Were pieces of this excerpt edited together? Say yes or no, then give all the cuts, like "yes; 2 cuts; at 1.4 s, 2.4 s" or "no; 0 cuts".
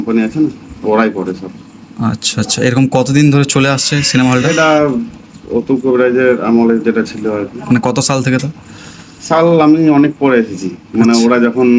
no; 0 cuts